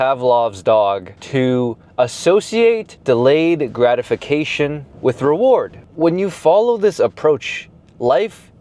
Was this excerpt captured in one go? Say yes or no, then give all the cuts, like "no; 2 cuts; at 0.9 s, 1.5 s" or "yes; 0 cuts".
no; 4 cuts; at 1.1 s, 2.9 s, 4.9 s, 5.8 s